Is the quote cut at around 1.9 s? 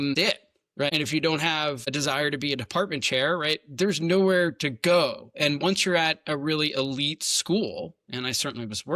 yes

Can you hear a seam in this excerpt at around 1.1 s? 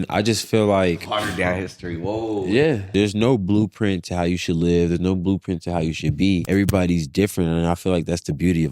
no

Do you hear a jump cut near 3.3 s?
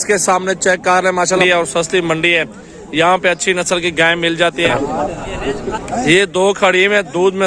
no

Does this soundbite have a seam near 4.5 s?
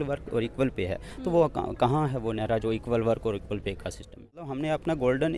yes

